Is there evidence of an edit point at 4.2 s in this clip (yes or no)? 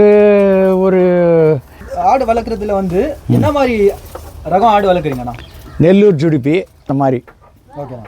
no